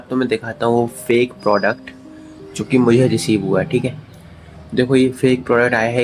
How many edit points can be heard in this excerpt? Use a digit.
0